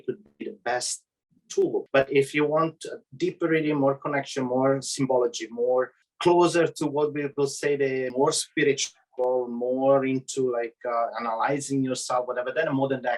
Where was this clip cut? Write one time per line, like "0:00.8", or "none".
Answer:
0:01.8
0:06.0
0:08.1

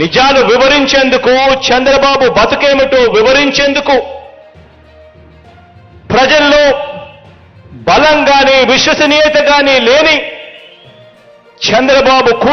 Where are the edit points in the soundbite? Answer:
0:04.4
0:06.0

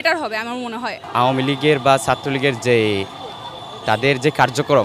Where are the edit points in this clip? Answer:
0:01.0

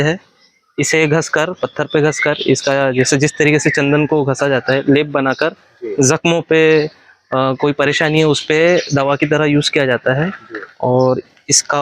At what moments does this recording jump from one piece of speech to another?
none

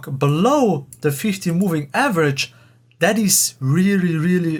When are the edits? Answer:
none

